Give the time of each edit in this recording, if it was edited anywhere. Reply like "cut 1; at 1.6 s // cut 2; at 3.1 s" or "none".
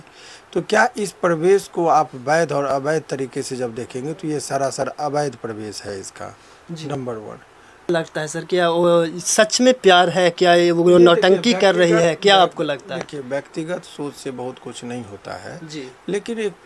cut 1; at 7.9 s